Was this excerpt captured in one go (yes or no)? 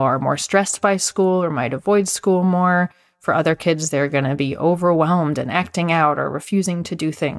yes